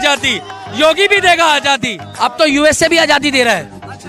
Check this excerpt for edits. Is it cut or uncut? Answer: cut